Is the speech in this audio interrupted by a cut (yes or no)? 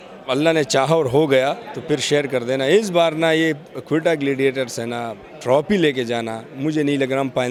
no